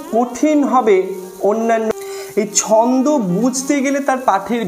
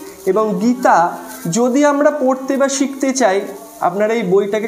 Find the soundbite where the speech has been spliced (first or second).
first